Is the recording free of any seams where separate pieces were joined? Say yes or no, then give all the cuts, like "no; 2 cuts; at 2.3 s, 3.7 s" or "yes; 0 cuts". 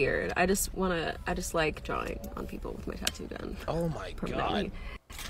no; 1 cut; at 1.4 s